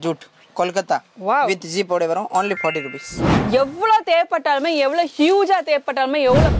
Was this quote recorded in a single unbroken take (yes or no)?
no